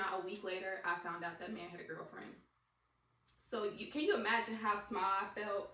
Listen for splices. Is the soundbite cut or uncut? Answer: uncut